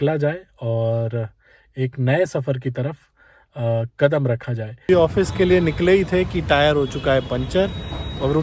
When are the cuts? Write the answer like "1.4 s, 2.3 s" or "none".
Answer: 4.9 s

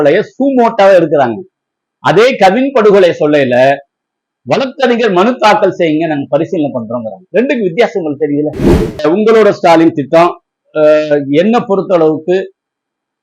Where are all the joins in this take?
9.0 s

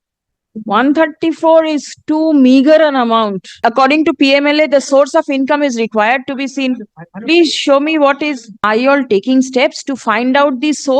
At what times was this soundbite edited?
3.6 s, 8.5 s

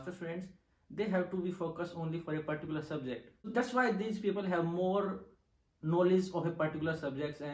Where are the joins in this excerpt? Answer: 3.5 s

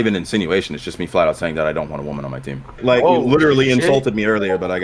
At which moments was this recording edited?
2.8 s

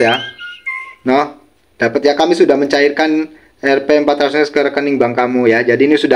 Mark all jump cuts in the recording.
none

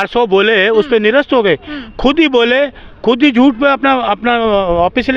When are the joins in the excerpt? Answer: none

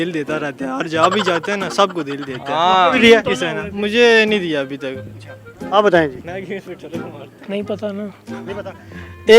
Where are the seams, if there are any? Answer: none

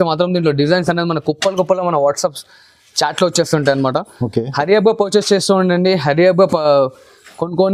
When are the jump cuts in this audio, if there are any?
none

